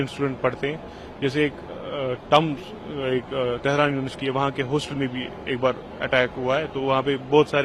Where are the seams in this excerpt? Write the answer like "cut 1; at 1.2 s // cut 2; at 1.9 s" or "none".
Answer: none